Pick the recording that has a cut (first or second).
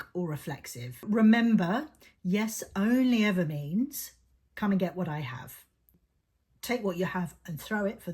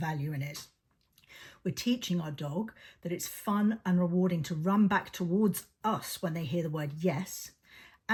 first